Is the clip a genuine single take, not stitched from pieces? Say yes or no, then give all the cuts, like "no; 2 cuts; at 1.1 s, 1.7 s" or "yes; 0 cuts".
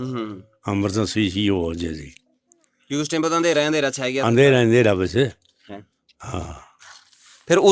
yes; 0 cuts